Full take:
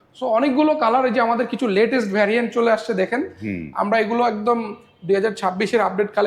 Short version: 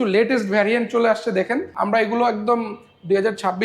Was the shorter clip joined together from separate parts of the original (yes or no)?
yes